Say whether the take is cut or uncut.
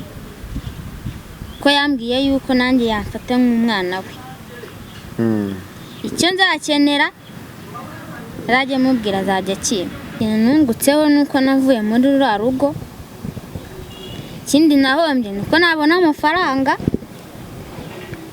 cut